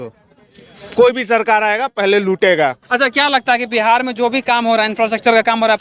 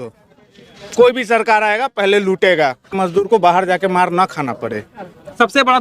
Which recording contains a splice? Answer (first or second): second